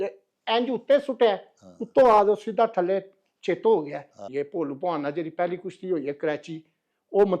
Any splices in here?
yes; 1 cut; at 4.2 s

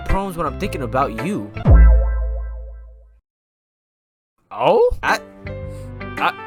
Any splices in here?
no; 0 cuts

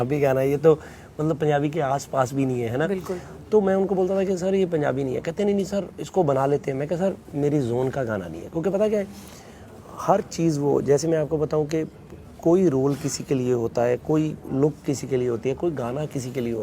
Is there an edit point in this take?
no; 0 cuts

